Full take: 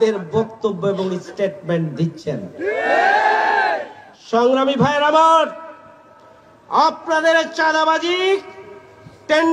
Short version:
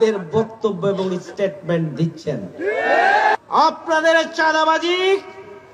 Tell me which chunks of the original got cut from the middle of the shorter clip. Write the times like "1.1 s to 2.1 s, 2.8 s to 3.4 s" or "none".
3.4 s to 6.6 s